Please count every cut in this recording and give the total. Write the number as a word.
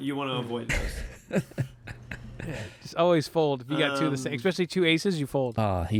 zero